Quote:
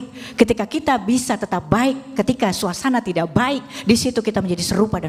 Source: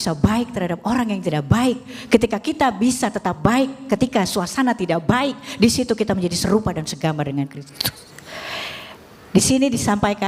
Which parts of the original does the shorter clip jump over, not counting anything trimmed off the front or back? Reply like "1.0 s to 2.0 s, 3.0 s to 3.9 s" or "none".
none